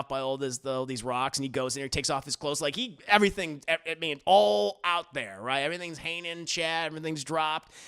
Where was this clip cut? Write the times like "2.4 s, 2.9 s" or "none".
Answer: none